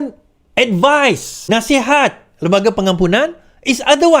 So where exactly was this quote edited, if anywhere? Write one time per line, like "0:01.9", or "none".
0:01.3